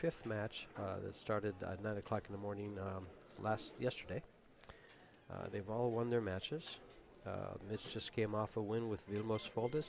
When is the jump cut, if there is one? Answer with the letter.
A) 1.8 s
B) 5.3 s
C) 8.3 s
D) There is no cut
C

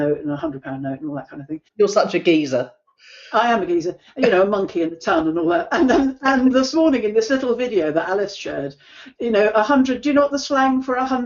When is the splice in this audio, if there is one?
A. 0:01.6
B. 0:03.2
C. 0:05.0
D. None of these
A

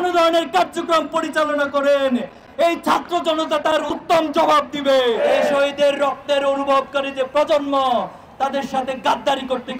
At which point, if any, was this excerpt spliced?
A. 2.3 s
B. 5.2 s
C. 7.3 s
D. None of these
B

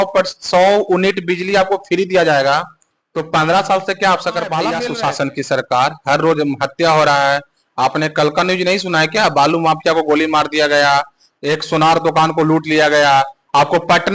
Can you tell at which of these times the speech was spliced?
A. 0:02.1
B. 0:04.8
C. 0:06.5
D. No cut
B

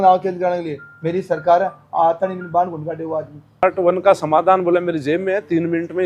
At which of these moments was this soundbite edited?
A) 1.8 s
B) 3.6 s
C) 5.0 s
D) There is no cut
B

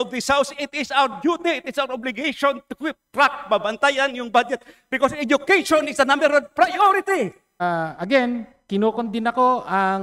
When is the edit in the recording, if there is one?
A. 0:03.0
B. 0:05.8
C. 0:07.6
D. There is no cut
C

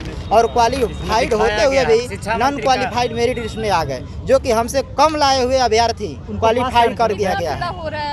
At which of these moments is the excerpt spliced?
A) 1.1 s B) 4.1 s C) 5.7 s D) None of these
D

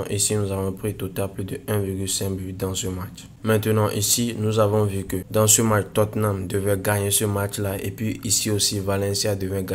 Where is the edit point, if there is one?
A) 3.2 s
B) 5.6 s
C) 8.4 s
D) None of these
A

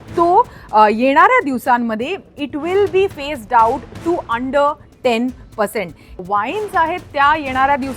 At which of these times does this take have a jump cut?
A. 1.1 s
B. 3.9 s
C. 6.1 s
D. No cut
C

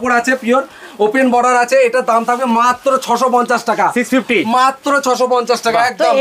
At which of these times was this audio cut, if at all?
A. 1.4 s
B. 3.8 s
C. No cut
C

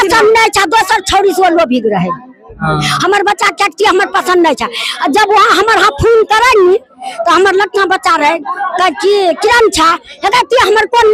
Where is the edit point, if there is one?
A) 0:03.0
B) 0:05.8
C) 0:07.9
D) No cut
D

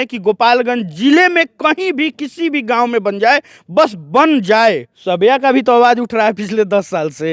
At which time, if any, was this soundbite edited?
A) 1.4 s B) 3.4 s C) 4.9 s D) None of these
C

